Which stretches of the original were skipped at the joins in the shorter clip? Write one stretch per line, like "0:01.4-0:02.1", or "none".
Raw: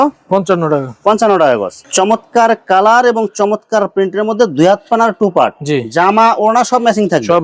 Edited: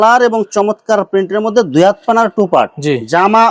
none